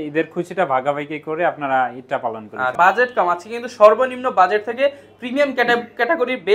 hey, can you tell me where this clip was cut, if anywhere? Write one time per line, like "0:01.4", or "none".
0:02.7